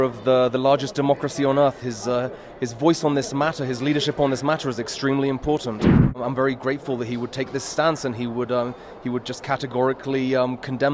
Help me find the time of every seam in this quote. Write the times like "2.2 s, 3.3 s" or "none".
6.2 s

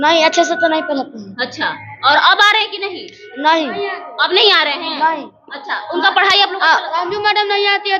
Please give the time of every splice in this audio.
none

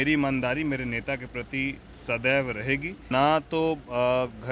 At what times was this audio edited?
3.1 s

